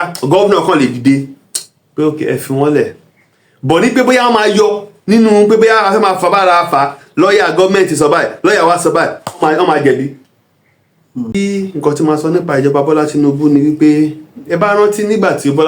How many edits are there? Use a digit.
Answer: 1